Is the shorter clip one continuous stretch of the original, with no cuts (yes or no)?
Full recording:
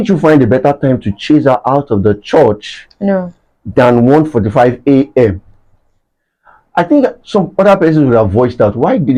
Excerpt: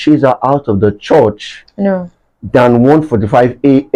yes